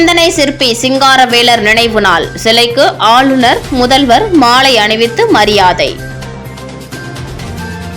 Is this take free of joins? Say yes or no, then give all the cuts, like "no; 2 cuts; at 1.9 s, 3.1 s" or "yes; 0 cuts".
yes; 0 cuts